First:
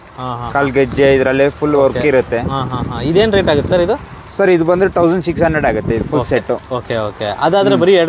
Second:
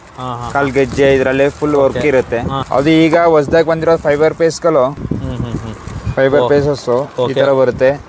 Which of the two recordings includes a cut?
second; 2 cuts; at 2.6 s, 5.0 s

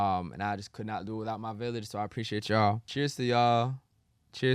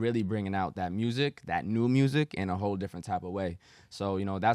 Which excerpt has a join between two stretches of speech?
first; 1 cut; at 2.9 s

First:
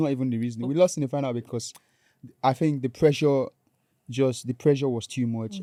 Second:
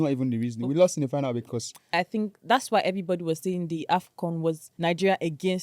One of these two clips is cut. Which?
second; 2 cuts; at 1.9 s, 4.7 s

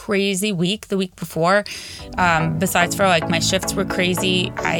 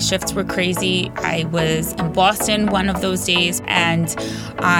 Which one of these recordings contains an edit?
second; 1 cut; at 3.6 s

